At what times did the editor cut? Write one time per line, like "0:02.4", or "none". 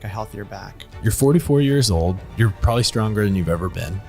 0:00.9